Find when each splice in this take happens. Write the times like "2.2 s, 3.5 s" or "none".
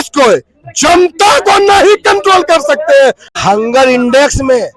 3.3 s